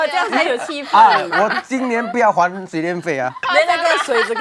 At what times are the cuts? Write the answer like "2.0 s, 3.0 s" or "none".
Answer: 3.4 s